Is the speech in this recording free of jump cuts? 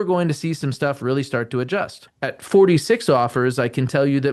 no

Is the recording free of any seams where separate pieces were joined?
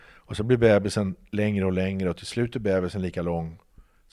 yes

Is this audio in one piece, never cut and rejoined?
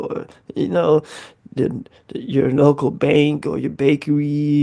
yes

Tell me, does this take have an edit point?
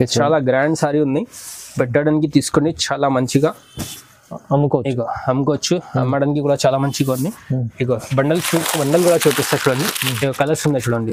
no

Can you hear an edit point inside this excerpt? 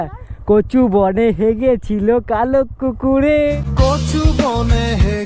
yes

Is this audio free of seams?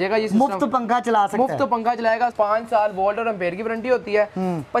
no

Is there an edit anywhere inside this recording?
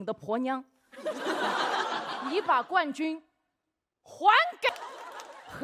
yes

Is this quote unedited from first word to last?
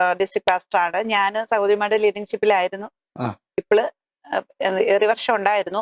yes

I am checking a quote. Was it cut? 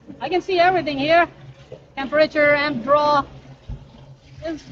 no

